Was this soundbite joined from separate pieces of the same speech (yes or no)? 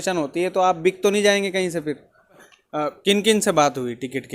yes